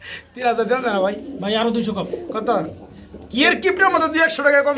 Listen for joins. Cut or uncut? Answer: uncut